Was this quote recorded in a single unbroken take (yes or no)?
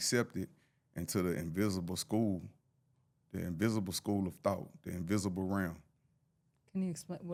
yes